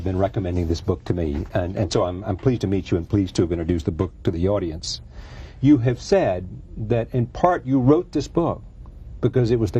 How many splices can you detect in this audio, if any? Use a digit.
1